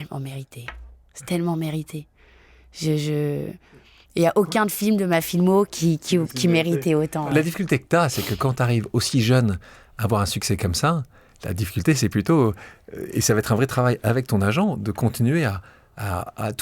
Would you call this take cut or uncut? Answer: uncut